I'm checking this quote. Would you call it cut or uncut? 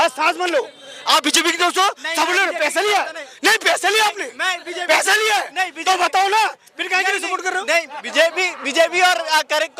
uncut